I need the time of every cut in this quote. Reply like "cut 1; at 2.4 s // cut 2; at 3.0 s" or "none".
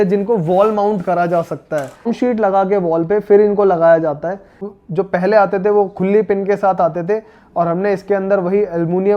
cut 1; at 2.0 s // cut 2; at 4.7 s

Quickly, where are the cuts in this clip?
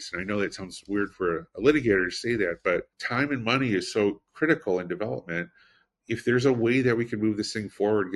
cut 1; at 3.0 s

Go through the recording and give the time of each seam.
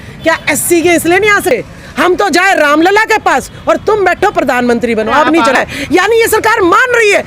cut 1; at 1.5 s // cut 2; at 5.5 s

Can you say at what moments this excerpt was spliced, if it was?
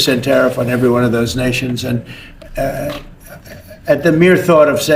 none

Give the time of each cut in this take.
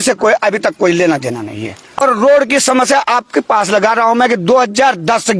cut 1; at 2.0 s

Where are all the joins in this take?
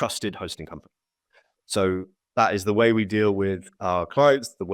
cut 1; at 2.2 s

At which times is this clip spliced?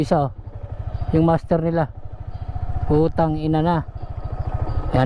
cut 1; at 4.1 s

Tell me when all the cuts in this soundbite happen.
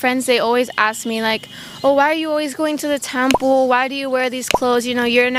none

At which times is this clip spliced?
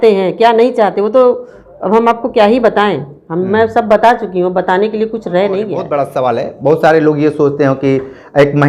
cut 1; at 5.9 s

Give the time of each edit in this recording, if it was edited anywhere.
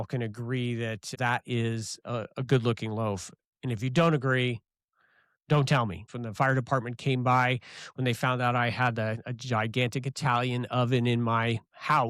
cut 1; at 1.1 s // cut 2; at 6.2 s

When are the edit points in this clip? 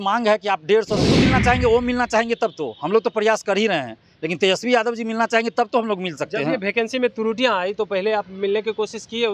cut 1; at 1.0 s

